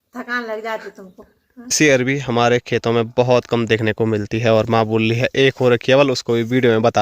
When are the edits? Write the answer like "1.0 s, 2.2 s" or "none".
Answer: 1.7 s